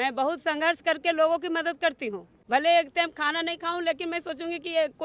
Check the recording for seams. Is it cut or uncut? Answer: cut